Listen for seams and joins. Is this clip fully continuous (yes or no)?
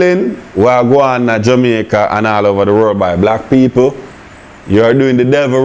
yes